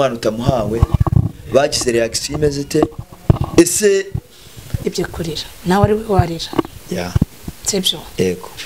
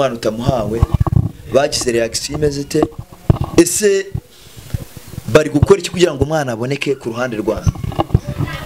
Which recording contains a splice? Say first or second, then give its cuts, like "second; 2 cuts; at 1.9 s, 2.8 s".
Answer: first; 1 cut; at 4.8 s